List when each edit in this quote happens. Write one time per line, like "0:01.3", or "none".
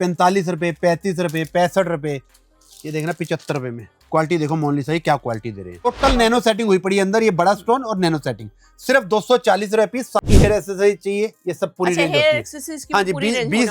0:05.9
0:10.3